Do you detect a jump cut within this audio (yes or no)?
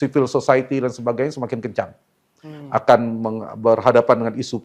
no